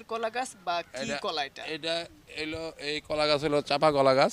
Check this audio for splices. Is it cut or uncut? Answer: uncut